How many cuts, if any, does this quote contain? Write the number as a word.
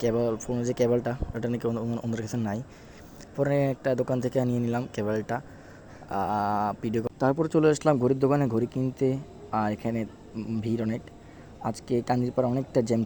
one